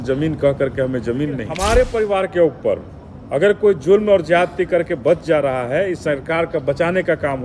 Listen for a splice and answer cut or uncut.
cut